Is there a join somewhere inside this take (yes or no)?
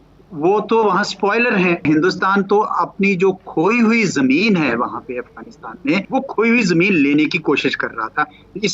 yes